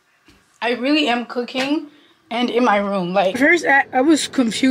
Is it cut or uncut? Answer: cut